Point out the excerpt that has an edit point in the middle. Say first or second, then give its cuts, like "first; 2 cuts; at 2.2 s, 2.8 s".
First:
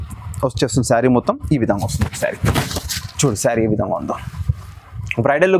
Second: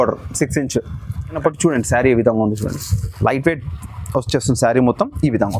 second; 1 cut; at 1.4 s